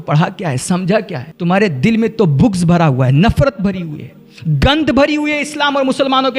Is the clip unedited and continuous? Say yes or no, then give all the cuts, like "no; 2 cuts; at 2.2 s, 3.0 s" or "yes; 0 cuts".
no; 1 cut; at 1.2 s